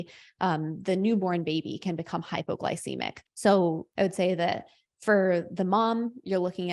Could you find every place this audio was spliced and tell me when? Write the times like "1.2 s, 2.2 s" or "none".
3.2 s, 3.9 s